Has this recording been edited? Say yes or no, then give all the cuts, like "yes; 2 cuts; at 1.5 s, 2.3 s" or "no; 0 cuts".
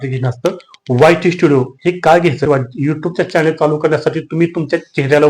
yes; 1 cut; at 2.4 s